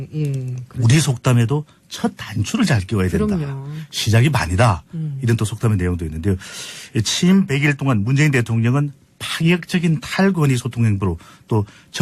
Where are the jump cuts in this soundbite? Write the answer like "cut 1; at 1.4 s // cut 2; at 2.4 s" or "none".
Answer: cut 1; at 10.0 s